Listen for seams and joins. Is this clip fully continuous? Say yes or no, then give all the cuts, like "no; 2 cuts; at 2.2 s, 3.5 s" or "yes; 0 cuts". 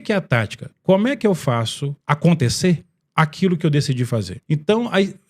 no; 2 cuts; at 1.9 s, 4.3 s